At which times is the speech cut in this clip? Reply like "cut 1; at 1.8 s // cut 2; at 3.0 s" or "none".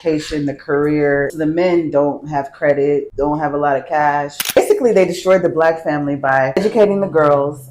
cut 1; at 1.3 s // cut 2; at 3.1 s // cut 3; at 4.6 s // cut 4; at 6.6 s